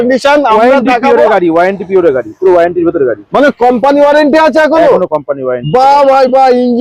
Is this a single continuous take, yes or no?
yes